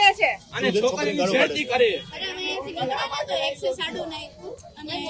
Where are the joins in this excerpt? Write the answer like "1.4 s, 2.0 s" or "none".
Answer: 2.2 s